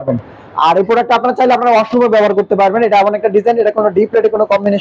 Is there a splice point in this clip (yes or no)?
no